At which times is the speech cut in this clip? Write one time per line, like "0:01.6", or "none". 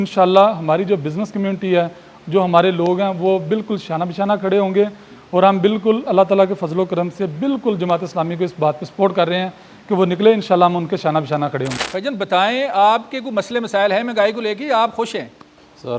none